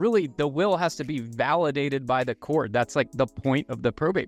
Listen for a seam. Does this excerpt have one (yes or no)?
no